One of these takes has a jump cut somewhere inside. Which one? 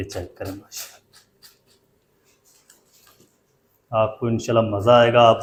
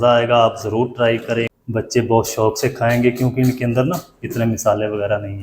second; 1 cut; at 1.5 s

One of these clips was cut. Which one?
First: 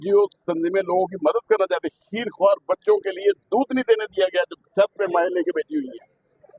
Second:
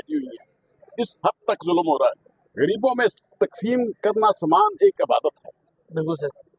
second; 1 cut; at 2.3 s

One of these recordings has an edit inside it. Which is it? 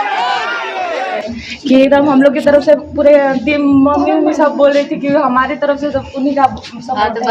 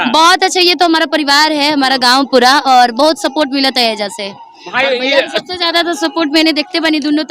first; 1 cut; at 1.2 s

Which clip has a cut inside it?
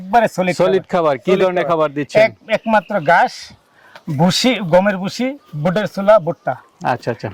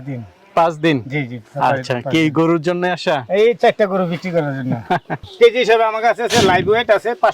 second; 1 cut; at 5.3 s

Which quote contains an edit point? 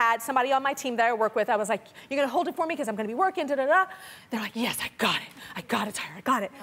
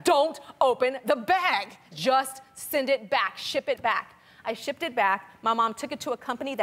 first; 1 cut; at 1.7 s

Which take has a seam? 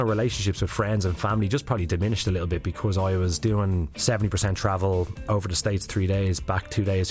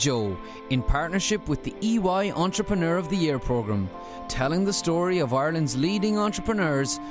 first; 2 cuts; at 3.9 s, 5.2 s

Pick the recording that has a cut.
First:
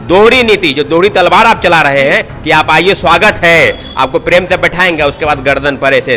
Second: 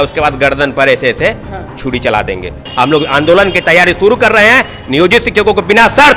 second; 1 cut; at 2.7 s

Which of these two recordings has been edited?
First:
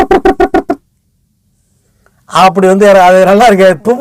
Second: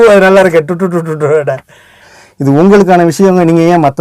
second; 1 cut; at 2.1 s

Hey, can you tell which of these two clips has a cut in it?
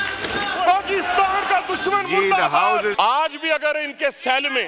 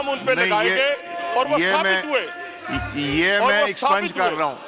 first; 1 cut; at 2.9 s

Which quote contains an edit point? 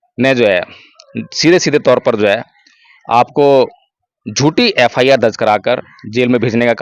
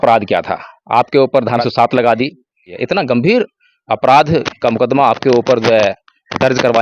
second; 2 cuts; at 1.6 s, 2.7 s

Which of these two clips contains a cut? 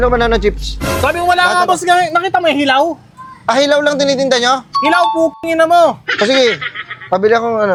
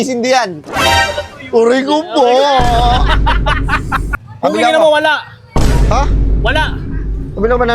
second; 1 cut; at 4.1 s

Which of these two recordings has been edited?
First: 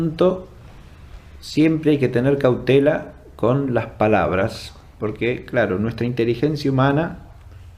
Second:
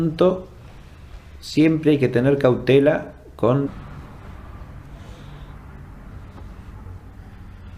first; 1 cut; at 3.7 s

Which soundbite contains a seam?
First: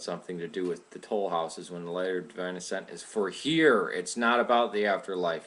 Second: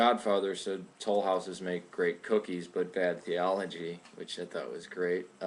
second; 1 cut; at 2.2 s

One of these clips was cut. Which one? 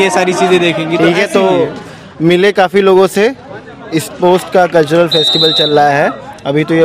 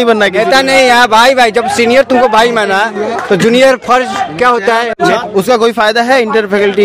second; 1 cut; at 5.2 s

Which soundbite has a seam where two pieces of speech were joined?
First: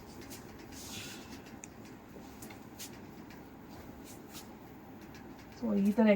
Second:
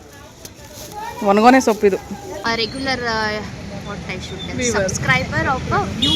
second; 1 cut; at 2.4 s

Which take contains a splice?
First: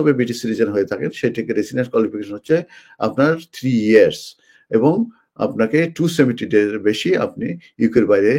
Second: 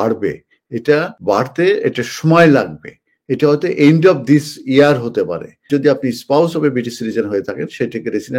second; 2 cuts; at 1.1 s, 5.7 s

